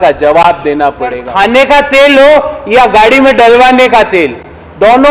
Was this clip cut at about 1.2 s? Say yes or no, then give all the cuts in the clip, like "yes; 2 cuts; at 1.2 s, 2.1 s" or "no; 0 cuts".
yes; 1 cut; at 1.2 s